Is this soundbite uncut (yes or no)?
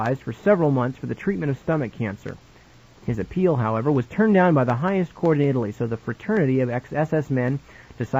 yes